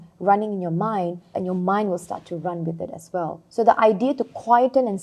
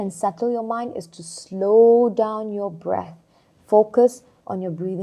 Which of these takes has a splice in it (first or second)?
first